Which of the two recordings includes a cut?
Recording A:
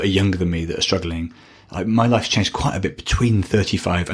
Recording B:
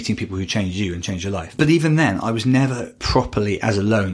B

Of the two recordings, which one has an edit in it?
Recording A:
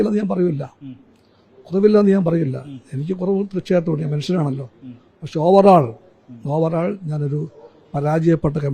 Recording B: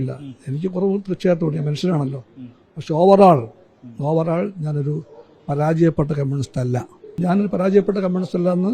B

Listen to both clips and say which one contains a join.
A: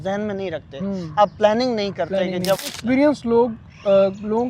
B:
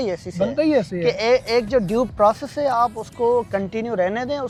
A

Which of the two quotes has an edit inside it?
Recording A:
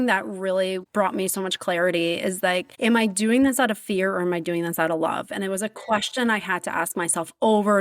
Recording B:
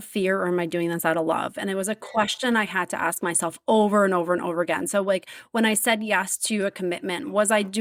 A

